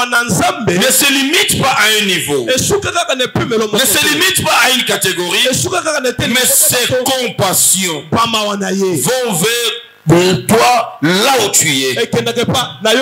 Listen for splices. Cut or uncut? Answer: uncut